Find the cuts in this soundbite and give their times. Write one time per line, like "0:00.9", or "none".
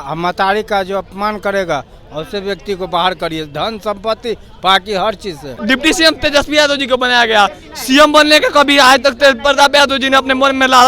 0:05.6